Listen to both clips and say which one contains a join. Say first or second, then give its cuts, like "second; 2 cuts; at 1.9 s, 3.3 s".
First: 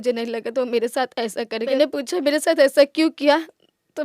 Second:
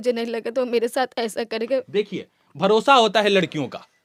first; 1 cut; at 1.8 s